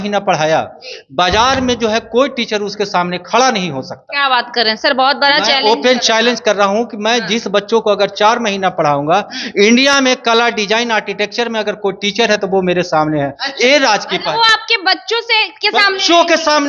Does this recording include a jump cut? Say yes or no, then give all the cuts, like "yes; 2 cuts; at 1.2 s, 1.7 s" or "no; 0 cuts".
no; 0 cuts